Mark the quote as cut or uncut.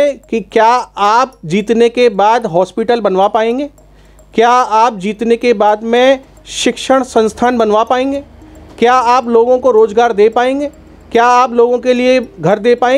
uncut